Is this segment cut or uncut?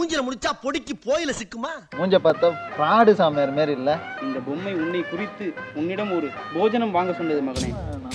cut